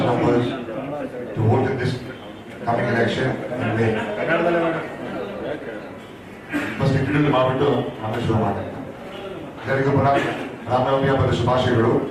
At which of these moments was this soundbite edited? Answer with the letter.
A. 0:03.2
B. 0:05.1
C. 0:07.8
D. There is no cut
D